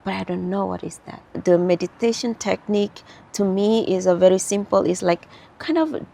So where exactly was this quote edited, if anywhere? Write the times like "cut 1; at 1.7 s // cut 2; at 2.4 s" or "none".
cut 1; at 1.4 s